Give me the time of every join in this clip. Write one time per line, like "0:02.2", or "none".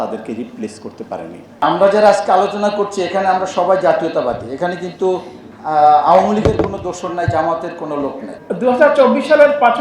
0:01.5
0:08.3